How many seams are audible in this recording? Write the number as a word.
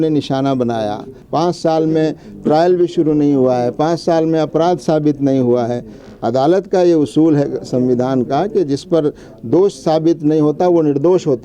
one